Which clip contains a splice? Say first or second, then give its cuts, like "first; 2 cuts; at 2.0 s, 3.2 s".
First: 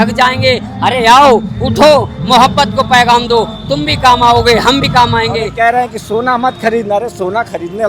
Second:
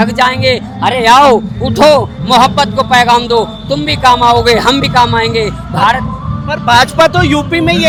first; 1 cut; at 5.5 s